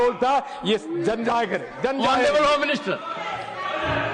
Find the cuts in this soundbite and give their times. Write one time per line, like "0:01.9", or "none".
none